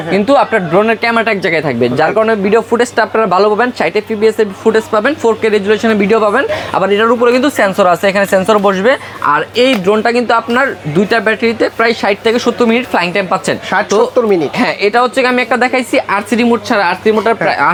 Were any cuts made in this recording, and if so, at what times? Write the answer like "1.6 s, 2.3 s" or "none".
none